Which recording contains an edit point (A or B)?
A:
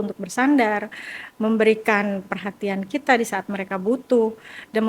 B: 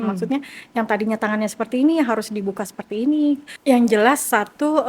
B